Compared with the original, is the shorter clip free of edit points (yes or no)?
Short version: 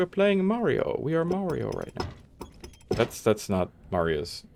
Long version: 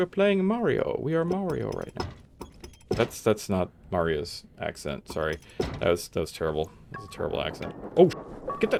yes